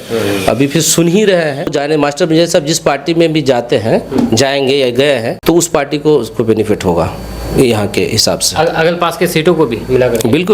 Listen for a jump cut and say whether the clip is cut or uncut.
cut